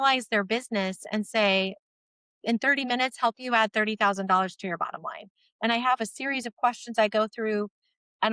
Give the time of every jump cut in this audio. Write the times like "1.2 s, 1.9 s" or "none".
none